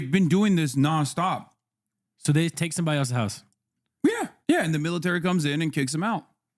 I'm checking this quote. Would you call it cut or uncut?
cut